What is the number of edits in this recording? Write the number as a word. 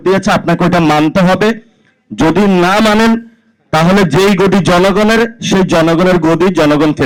zero